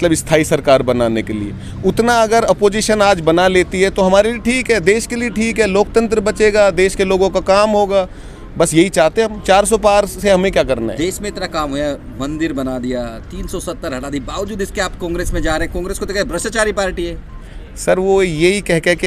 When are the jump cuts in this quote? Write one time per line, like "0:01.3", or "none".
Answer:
none